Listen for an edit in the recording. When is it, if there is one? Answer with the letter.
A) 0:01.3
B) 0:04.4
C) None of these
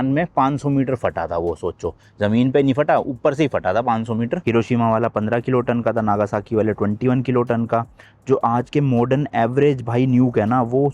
B